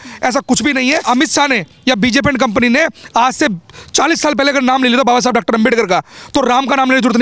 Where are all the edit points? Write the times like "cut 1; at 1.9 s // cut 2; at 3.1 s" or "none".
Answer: cut 1; at 1.0 s